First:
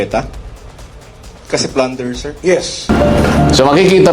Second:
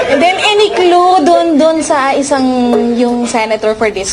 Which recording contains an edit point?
first; 1 cut; at 2.9 s

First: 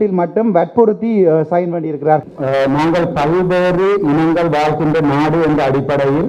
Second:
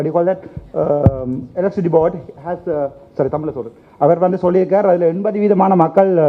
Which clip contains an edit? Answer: first; 1 cut; at 2.2 s

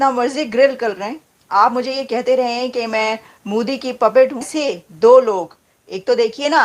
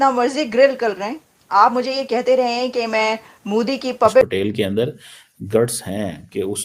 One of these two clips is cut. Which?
second; 1 cut; at 4.2 s

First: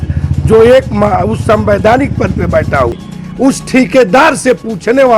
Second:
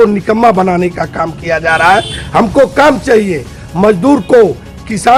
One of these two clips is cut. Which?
first; 1 cut; at 2.9 s

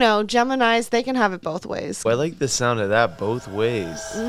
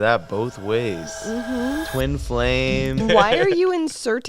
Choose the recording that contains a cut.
second; 1 cut; at 3.0 s

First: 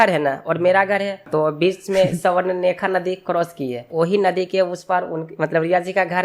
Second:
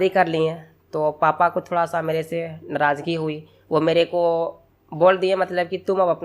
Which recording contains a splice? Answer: first; 2 cuts; at 1.3 s, 3.9 s

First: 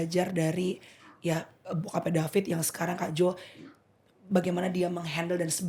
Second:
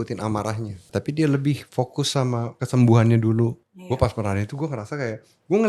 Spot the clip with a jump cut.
second; 3 cuts; at 0.8 s, 2.5 s, 3.7 s

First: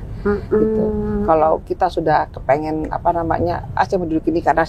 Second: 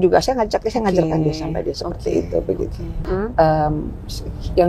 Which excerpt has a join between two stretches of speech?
second; 1 cut; at 3.1 s

